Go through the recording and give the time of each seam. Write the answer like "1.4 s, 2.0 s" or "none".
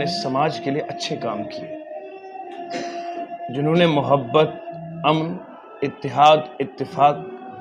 none